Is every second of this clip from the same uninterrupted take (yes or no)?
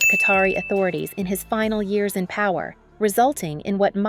no